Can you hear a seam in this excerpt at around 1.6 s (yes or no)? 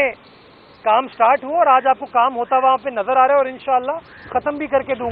no